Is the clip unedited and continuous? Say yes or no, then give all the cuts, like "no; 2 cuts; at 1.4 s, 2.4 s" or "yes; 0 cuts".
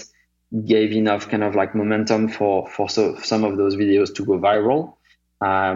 yes; 0 cuts